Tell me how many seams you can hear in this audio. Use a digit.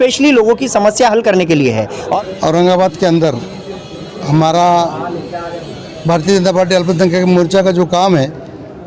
1